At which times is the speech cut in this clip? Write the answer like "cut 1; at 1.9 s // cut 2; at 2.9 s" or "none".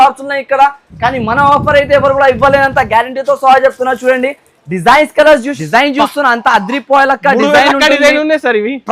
cut 1; at 5.5 s